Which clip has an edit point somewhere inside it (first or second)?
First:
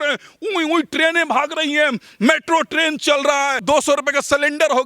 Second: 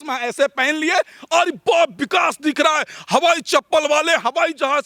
first